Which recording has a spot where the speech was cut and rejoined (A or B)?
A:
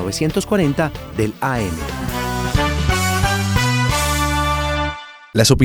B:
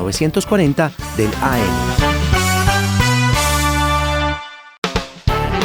B